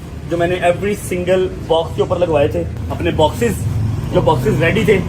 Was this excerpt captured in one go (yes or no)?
no